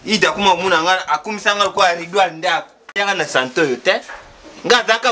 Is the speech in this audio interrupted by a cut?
yes; 1 cut; at 2.9 s

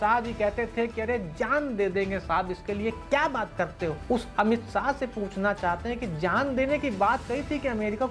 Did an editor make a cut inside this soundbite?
no; 0 cuts

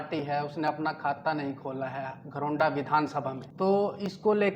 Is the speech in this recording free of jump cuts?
no; 1 cut; at 3.4 s

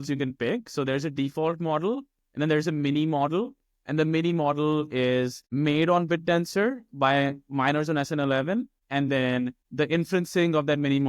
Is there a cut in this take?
yes; 3 cuts; at 5.4 s, 8.8 s, 9.6 s

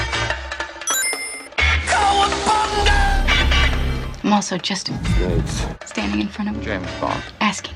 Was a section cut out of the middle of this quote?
no; 0 cuts

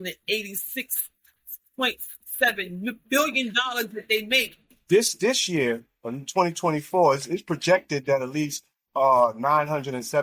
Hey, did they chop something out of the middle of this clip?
yes; 1 cut; at 4.8 s

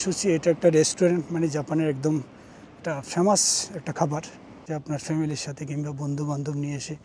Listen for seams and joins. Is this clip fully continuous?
no; 1 cut; at 4.6 s

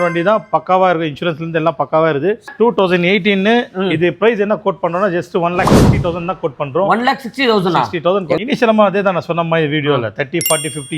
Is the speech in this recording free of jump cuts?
no; 2 cuts; at 2.5 s, 8.4 s

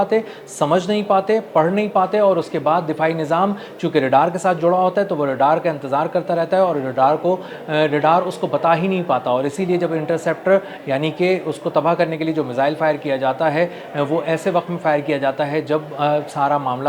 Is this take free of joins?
yes; 0 cuts

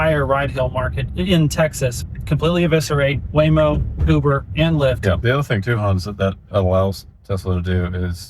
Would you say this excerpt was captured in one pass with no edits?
no; 3 cuts; at 1.0 s, 2.0 s, 5.2 s

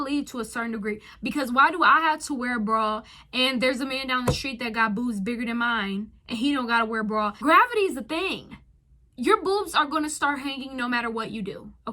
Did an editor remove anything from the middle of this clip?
yes; 1 cut; at 7.4 s

